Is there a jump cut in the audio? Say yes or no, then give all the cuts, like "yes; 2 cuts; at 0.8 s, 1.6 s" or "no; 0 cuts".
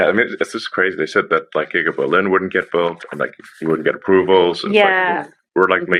no; 0 cuts